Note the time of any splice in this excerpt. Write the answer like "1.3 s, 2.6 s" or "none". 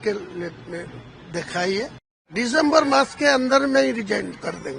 2.2 s

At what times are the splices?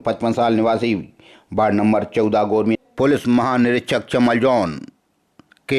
2.8 s

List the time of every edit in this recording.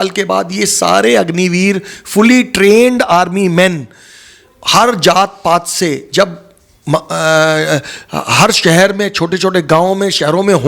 none

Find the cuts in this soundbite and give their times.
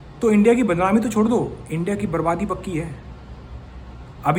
none

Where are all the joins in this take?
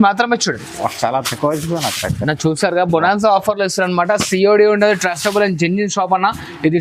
none

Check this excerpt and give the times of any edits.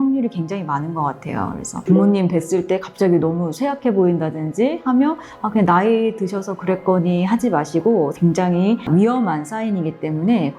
8.1 s

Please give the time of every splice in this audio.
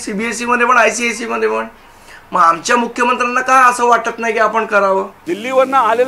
5.0 s

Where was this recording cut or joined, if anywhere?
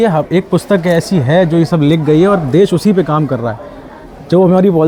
none

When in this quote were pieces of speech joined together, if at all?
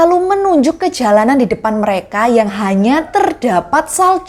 none

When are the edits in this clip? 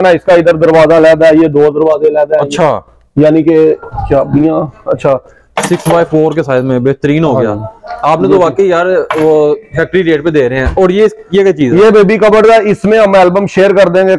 5.4 s

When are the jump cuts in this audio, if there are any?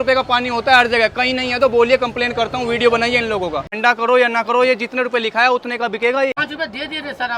3.7 s, 6.5 s

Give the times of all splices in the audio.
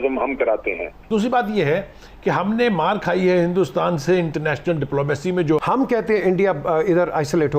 0.9 s, 5.6 s

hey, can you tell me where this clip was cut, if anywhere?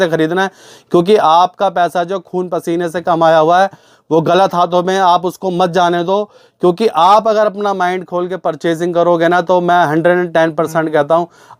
none

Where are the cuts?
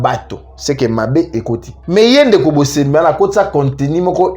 1.7 s

